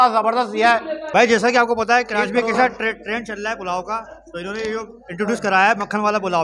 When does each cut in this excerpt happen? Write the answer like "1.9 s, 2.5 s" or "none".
1.0 s